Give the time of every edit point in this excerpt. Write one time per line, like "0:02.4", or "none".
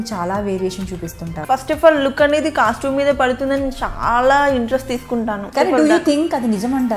0:01.4
0:05.4